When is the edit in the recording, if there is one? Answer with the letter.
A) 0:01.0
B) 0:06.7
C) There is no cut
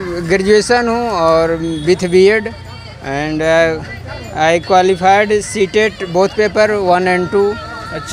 C